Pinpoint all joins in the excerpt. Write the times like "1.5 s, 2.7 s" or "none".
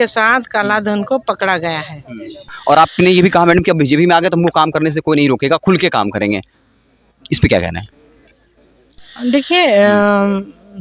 2.5 s